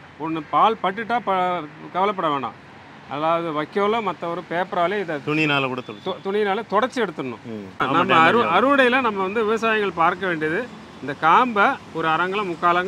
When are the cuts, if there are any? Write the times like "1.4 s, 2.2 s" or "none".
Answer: 7.8 s